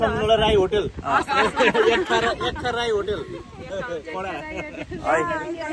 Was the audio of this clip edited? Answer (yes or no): no